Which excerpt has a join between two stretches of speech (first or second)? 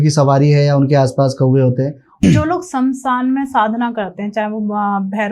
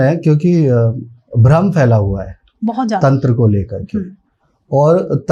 first